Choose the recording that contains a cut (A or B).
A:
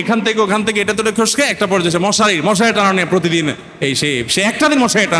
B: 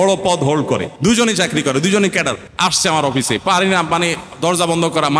B